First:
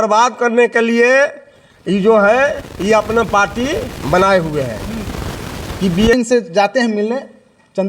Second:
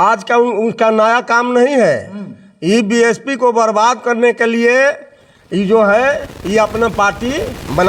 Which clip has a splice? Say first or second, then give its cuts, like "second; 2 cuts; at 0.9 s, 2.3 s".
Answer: first; 1 cut; at 6.1 s